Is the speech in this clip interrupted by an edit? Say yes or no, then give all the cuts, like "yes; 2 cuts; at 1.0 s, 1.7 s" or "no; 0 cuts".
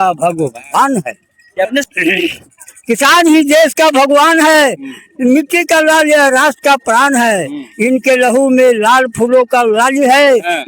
yes; 1 cut; at 1.9 s